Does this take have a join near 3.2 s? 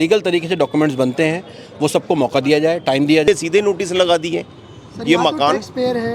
yes; 1 cut; at 3.2 s

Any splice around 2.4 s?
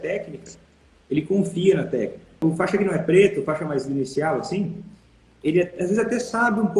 yes; 1 cut; at 2.4 s

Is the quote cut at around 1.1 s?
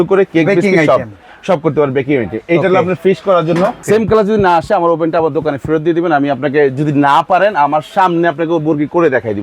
no; 1 cut; at 3.8 s

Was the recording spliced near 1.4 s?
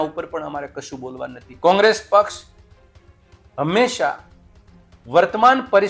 yes; 1 cut; at 1.4 s

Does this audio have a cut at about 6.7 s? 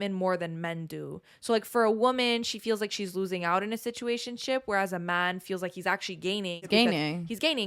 yes; 1 cut; at 6.7 s

